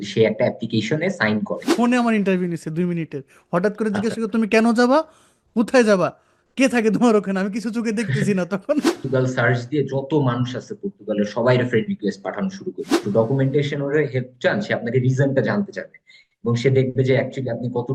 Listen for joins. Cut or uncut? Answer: cut